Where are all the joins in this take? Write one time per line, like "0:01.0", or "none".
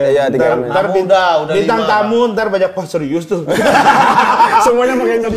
none